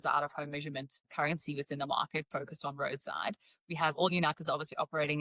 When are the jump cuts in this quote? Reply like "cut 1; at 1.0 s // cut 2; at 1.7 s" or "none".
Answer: cut 1; at 1.1 s